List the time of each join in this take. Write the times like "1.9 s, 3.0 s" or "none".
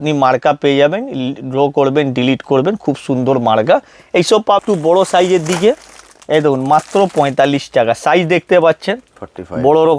4.6 s